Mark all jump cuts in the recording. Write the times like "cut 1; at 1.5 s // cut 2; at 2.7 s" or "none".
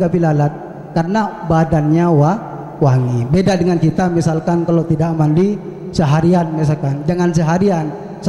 none

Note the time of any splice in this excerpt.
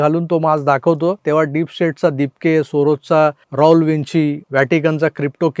cut 1; at 1.2 s // cut 2; at 3.4 s // cut 3; at 4.4 s

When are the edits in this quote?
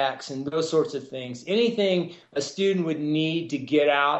none

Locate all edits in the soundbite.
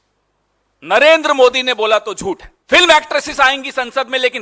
cut 1; at 2.5 s

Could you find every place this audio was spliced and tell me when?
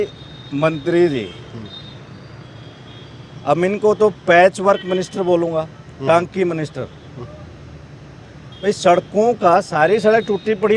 none

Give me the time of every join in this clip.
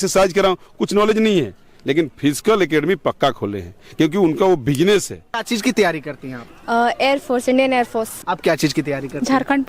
cut 1; at 5.4 s // cut 2; at 8.2 s

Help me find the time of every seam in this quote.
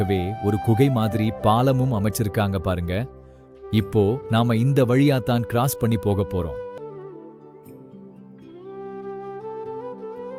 none

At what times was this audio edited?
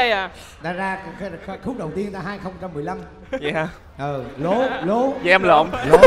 none

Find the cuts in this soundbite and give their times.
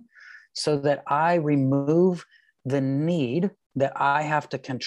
cut 1; at 3.6 s

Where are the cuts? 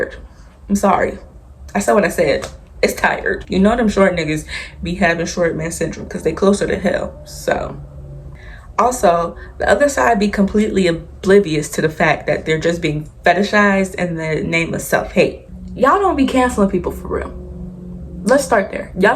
cut 1; at 3.4 s // cut 2; at 8.2 s // cut 3; at 15.4 s

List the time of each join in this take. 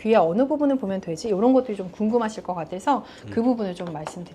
none

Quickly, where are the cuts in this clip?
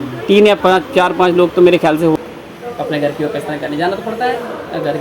cut 1; at 2.2 s

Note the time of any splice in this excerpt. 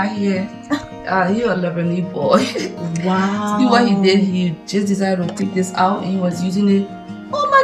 none

